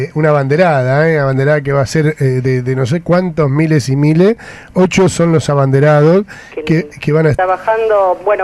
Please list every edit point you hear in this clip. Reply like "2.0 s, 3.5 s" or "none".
none